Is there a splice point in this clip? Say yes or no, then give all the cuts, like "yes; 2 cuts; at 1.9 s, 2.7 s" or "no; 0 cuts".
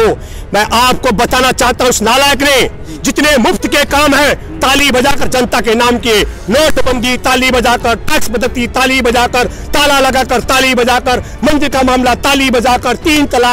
no; 0 cuts